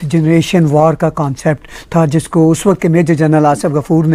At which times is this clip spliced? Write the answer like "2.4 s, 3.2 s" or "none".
none